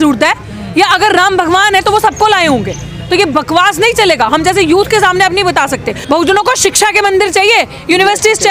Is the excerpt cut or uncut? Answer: cut